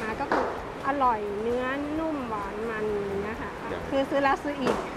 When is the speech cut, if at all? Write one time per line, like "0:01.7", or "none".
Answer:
0:03.7